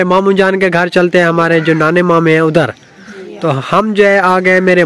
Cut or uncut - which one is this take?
uncut